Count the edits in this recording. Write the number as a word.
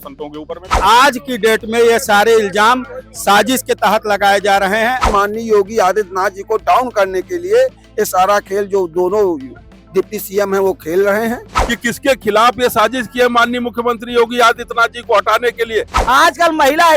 four